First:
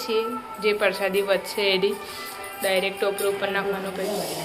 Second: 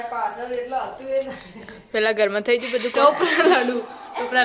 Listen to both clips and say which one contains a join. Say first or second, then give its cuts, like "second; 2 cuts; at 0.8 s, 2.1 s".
second; 1 cut; at 2.9 s